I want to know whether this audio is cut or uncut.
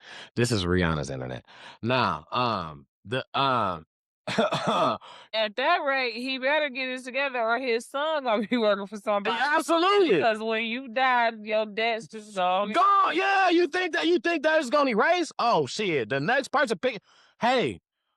cut